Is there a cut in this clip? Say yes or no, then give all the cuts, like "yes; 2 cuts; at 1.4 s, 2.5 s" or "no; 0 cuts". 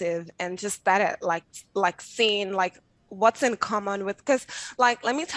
no; 0 cuts